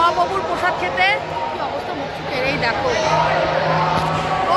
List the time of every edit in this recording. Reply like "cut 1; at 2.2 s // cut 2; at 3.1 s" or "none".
none